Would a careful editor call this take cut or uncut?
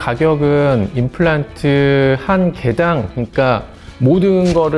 uncut